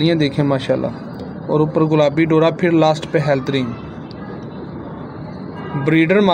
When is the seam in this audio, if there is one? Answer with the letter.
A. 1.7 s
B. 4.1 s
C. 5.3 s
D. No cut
D